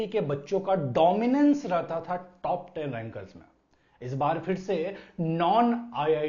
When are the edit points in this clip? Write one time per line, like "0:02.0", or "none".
none

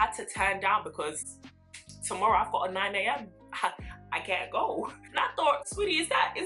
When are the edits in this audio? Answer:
0:05.0

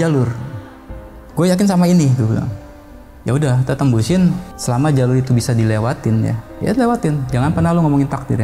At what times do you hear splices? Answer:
0:04.5
0:06.4

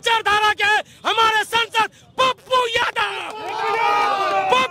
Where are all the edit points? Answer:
none

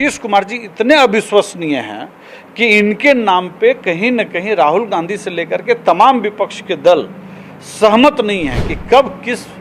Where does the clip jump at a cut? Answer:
none

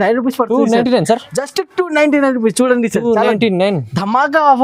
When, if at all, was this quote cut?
none

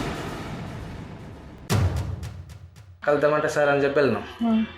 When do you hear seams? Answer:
0:03.0

